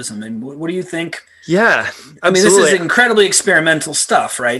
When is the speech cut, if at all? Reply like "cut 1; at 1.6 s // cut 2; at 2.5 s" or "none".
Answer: cut 1; at 1.3 s